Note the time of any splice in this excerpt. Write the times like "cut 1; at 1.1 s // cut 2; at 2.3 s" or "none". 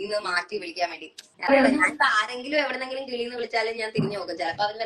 cut 1; at 1.3 s

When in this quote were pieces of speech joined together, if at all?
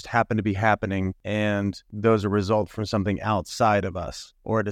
cut 1; at 1.5 s

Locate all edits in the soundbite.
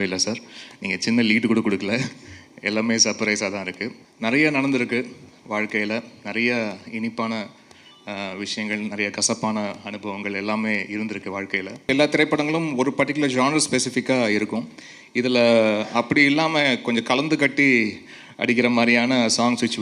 cut 1; at 4.0 s // cut 2; at 11.9 s

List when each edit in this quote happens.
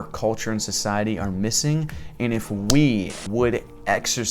cut 1; at 3.2 s

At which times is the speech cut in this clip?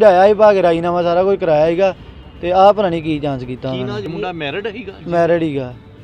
cut 1; at 4.0 s

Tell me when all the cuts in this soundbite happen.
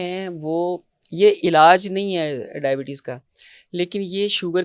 none

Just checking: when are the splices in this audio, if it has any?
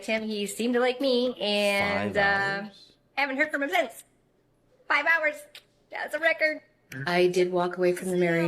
cut 1; at 6.7 s

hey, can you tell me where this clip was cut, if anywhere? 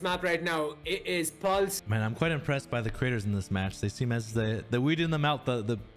none

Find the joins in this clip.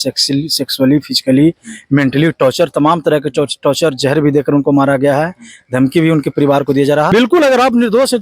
cut 1; at 7.1 s

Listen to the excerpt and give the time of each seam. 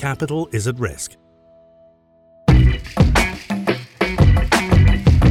cut 1; at 2.3 s

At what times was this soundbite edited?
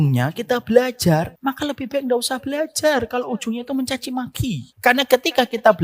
cut 1; at 1.3 s // cut 2; at 4.7 s

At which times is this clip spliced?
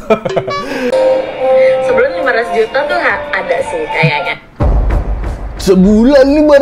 cut 1; at 0.9 s

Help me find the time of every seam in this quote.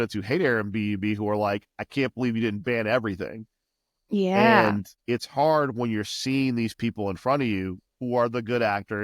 cut 1; at 4.9 s

